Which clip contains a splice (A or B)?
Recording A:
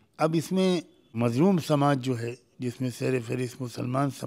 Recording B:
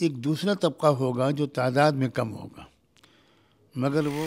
A